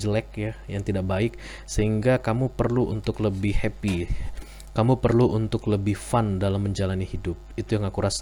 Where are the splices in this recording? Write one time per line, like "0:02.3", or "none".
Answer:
none